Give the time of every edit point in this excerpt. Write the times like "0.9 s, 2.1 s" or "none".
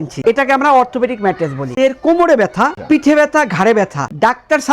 1.7 s